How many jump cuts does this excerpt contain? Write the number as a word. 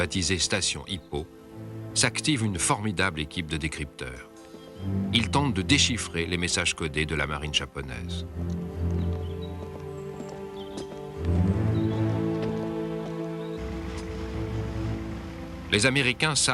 zero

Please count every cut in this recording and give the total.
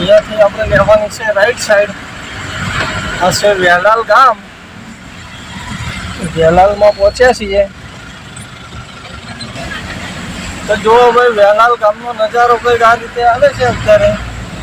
zero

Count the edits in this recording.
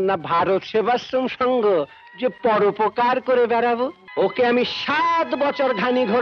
one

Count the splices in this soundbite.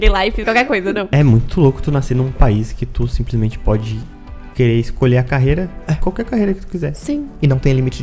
one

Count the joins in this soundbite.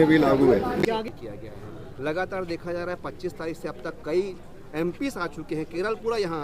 one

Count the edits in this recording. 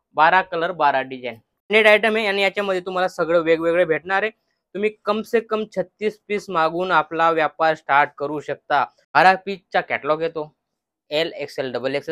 two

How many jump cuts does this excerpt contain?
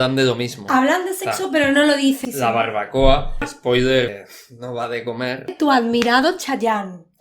four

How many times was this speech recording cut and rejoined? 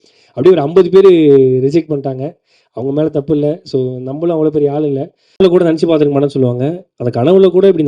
one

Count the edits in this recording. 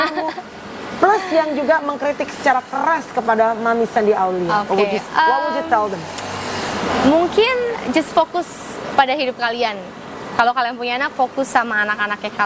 zero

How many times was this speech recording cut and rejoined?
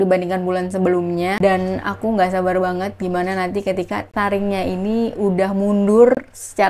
one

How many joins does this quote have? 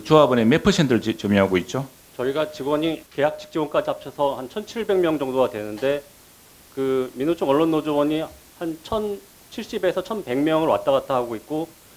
two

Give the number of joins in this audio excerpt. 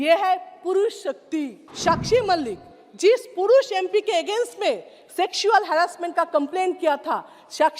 one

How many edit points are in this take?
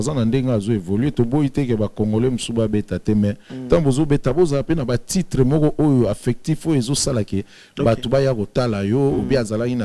zero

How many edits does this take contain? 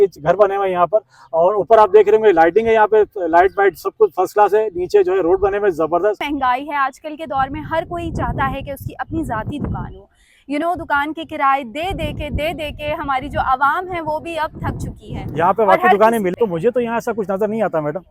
two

